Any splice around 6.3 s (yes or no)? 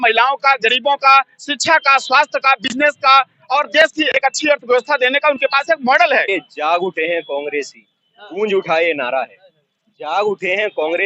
yes